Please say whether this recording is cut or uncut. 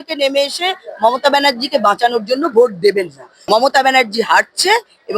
cut